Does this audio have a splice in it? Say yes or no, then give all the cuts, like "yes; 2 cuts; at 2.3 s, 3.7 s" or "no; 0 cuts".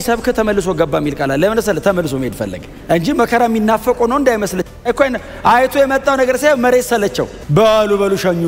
no; 0 cuts